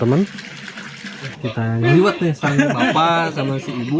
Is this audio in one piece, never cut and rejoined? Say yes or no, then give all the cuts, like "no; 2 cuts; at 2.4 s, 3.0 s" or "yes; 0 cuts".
no; 1 cut; at 1.4 s